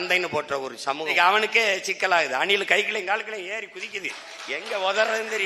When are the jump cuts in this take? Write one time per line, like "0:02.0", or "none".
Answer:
0:01.1